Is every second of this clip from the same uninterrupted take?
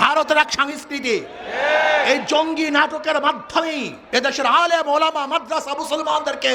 yes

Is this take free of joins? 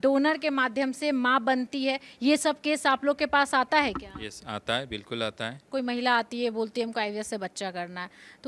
no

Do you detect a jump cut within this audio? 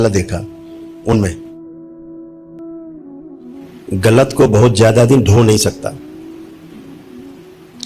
yes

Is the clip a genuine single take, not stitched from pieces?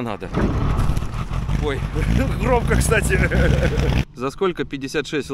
no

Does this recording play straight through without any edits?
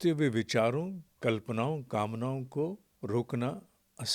no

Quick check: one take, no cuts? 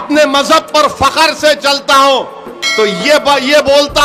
yes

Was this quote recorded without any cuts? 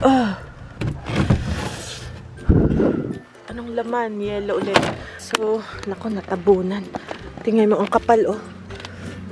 no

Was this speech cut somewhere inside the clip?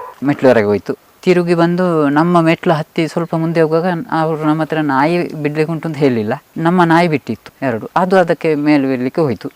no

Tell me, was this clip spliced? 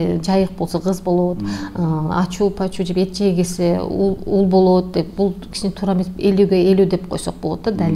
no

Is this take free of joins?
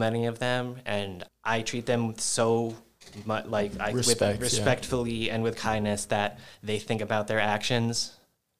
no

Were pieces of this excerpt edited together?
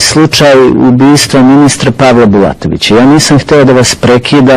no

